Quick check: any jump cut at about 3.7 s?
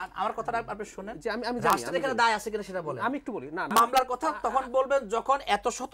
yes; 1 cut; at 3.7 s

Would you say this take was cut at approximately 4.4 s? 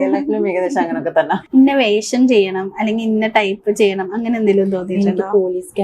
no; 1 cut; at 1.4 s

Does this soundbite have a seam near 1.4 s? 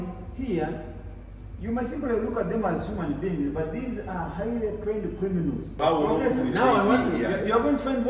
no; 1 cut; at 5.8 s

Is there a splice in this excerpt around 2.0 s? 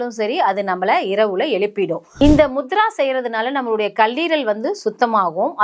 yes; 1 cut; at 2.0 s

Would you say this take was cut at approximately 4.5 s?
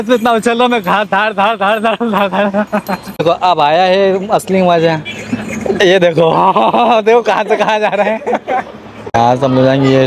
no; 2 cuts; at 3.2 s, 9.1 s

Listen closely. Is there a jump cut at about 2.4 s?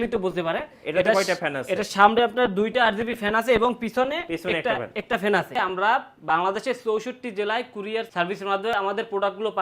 no; 2 cuts; at 5.5 s, 8.5 s

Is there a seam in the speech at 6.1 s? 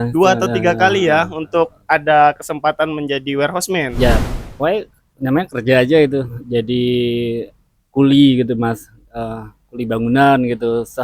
no; 1 cut; at 4.3 s

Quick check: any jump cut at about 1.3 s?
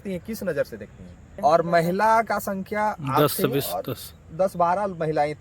yes; 1 cut; at 1.3 s

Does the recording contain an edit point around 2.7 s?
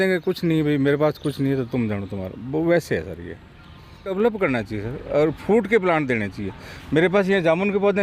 no; 1 cut; at 4.1 s

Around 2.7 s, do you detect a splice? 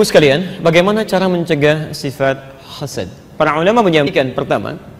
no; 1 cut; at 4.1 s

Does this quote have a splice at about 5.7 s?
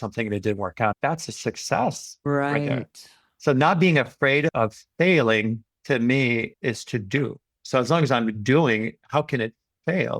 yes; 1 cut; at 5.7 s

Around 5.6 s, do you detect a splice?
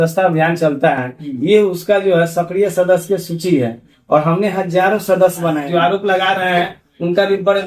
yes; 1 cut; at 5.6 s

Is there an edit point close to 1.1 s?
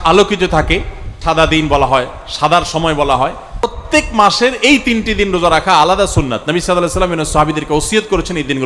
yes; 2 cuts; at 1.1 s, 3.8 s

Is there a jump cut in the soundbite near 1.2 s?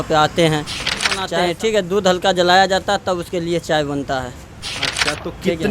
yes; 1 cut; at 1.2 s

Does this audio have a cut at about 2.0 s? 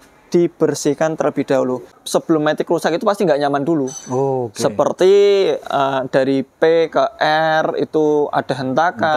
yes; 1 cut; at 2.0 s

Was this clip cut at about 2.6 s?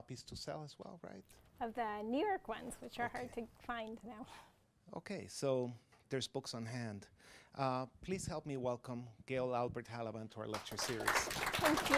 yes; 1 cut; at 2.6 s

